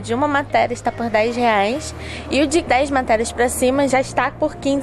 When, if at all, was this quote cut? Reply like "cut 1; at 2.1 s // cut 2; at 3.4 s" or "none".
cut 1; at 2.7 s // cut 2; at 3.9 s